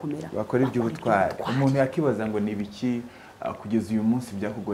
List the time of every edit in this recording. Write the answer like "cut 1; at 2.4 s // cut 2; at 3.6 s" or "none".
none